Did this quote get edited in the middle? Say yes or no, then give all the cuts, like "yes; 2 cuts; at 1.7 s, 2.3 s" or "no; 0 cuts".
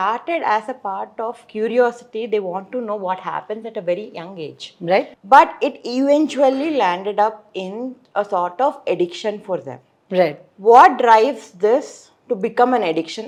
no; 0 cuts